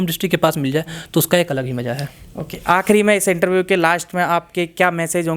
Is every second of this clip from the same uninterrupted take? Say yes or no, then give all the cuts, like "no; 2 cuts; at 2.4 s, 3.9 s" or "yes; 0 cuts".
yes; 0 cuts